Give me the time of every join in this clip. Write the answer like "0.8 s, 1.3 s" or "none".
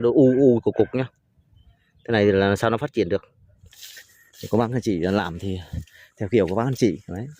3.6 s